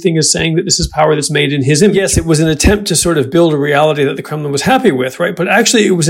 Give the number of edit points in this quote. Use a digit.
1